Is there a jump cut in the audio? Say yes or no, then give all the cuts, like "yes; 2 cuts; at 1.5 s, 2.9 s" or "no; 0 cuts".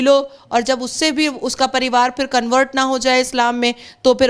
no; 0 cuts